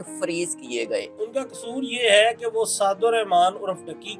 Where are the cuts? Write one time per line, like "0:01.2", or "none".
0:01.2